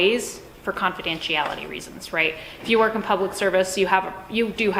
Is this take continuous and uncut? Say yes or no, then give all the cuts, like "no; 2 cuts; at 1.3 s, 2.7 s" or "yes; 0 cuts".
yes; 0 cuts